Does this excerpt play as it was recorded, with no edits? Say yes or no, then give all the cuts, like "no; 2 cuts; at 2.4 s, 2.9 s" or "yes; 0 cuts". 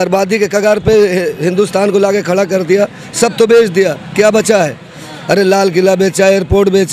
yes; 0 cuts